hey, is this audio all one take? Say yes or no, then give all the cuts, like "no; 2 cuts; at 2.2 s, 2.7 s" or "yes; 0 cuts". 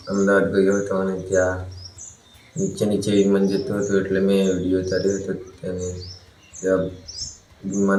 yes; 0 cuts